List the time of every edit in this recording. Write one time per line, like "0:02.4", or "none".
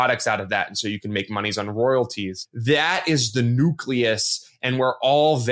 0:02.5